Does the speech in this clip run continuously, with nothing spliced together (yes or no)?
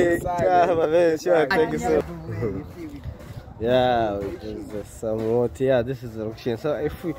no